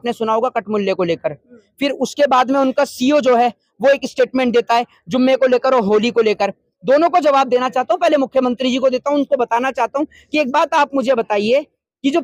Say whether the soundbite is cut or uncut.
uncut